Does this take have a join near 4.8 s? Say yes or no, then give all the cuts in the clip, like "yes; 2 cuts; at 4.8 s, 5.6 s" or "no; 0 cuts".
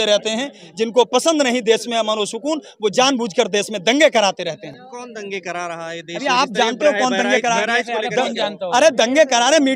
no; 0 cuts